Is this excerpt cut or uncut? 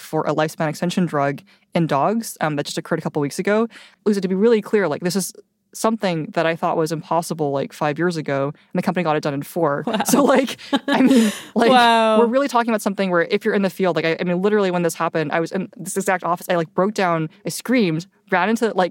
cut